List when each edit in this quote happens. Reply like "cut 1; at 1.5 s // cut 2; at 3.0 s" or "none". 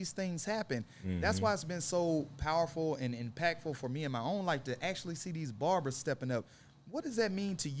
none